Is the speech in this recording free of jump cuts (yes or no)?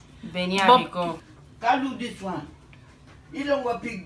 no